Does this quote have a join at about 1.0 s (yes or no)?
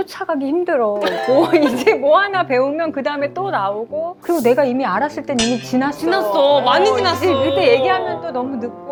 no